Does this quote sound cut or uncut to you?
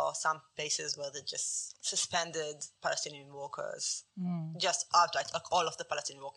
uncut